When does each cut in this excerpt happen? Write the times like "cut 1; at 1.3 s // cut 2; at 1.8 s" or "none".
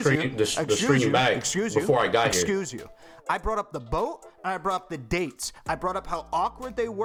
none